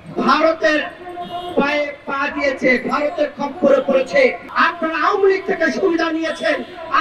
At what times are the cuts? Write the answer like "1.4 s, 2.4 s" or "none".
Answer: 4.4 s